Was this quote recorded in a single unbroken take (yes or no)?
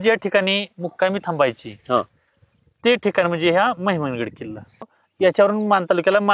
no